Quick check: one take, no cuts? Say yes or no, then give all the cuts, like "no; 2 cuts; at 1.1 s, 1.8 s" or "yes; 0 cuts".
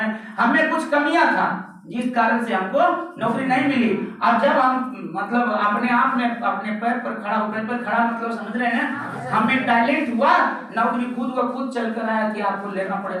yes; 0 cuts